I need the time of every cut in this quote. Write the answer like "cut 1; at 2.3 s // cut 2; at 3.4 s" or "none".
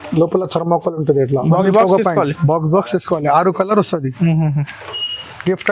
cut 1; at 1.5 s

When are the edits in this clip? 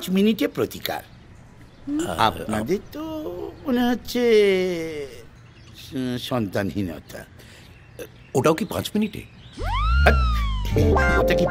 none

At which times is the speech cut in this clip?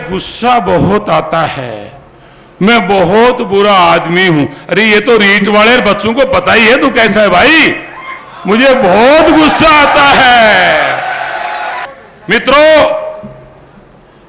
cut 1; at 11.9 s

